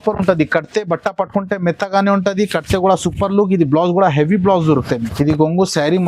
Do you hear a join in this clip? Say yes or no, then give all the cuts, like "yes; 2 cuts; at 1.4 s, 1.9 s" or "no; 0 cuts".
yes; 1 cut; at 4.9 s